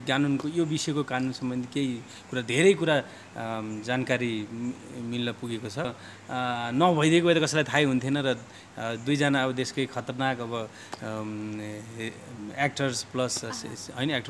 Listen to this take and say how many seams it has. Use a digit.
1